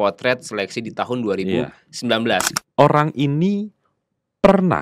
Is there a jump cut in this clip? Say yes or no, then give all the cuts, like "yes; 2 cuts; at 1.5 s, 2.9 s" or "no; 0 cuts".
yes; 1 cut; at 2.5 s